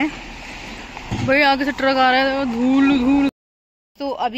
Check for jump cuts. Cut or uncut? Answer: cut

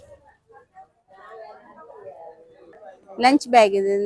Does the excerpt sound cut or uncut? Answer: cut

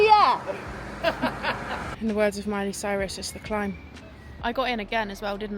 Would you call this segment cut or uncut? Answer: cut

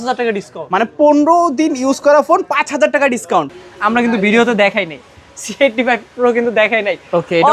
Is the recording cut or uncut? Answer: cut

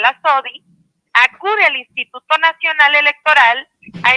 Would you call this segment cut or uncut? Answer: uncut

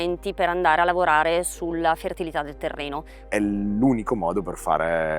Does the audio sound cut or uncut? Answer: cut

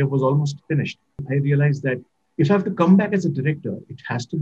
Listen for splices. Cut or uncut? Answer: cut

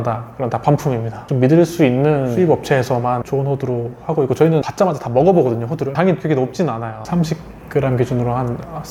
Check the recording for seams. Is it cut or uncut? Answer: cut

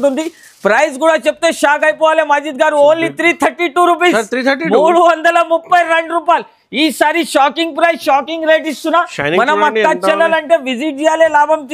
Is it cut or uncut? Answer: uncut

